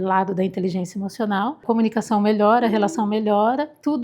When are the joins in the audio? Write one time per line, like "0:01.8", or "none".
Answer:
0:01.6